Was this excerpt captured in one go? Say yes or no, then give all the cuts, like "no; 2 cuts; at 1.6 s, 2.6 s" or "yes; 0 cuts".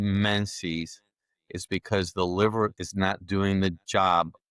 no; 1 cut; at 2.7 s